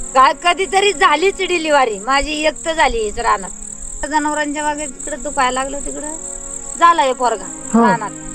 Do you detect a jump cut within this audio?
yes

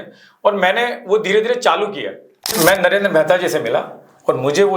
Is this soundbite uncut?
no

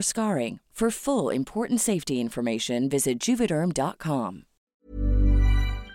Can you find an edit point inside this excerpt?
yes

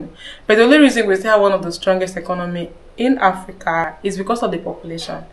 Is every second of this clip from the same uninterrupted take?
no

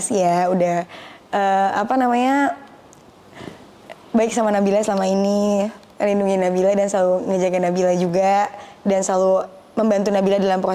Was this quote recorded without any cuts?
yes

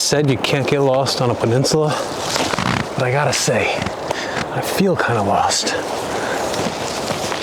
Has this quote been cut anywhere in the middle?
no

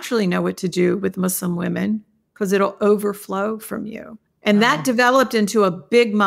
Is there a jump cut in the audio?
no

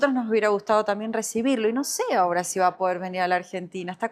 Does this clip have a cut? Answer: no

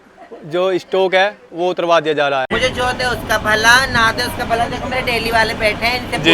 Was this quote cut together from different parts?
yes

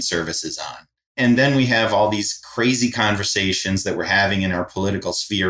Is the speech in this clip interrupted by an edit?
yes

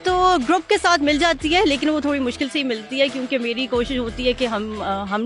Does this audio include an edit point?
no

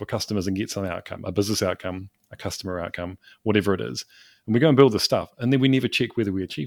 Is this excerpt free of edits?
yes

